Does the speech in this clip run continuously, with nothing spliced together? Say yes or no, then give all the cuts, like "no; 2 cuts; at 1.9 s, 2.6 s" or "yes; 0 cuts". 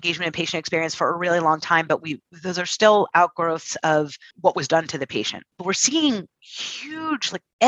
no; 2 cuts; at 4.3 s, 5.5 s